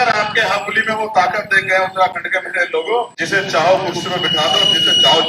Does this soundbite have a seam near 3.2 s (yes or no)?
yes